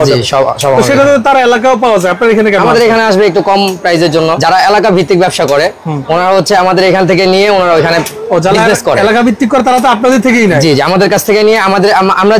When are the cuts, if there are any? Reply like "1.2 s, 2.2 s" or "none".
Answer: 4.4 s